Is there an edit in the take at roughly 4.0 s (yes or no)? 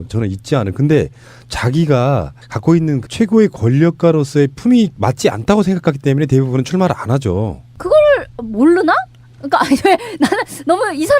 yes